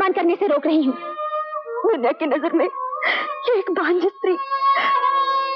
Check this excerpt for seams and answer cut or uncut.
cut